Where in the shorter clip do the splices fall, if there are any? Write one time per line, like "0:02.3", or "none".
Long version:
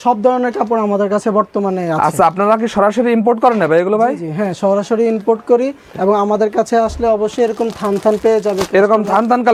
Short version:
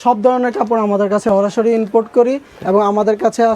0:01.3